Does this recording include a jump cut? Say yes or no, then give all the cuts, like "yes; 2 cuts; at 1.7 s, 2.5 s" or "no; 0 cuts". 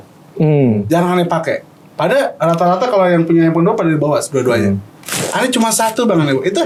no; 0 cuts